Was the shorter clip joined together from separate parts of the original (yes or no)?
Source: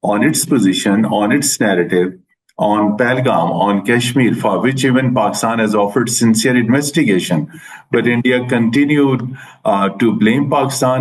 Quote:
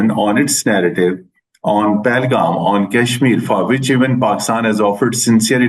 no